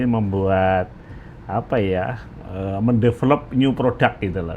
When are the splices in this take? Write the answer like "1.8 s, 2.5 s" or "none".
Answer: none